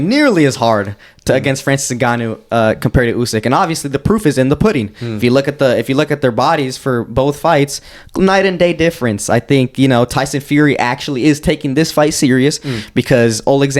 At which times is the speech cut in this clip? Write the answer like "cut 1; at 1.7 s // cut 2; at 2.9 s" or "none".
none